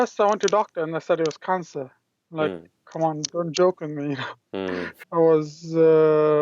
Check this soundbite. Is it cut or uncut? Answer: cut